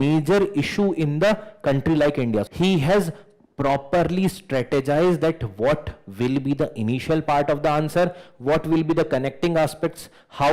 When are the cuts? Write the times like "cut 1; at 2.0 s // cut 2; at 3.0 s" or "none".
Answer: cut 1; at 2.5 s

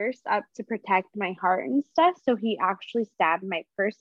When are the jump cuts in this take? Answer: none

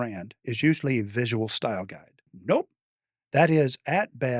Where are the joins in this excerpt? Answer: cut 1; at 2.3 s

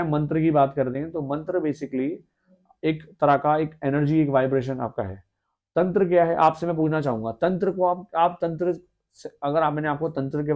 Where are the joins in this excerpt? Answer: none

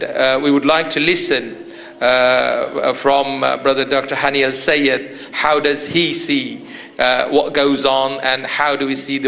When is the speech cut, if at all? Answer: cut 1; at 1.2 s

